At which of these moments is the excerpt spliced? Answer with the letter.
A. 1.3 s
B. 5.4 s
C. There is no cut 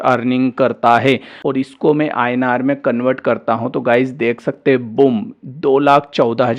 A